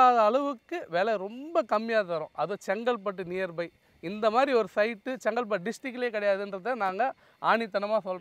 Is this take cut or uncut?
uncut